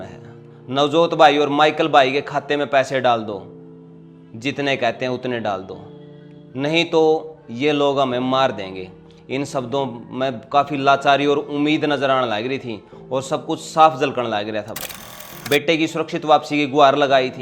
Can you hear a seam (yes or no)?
yes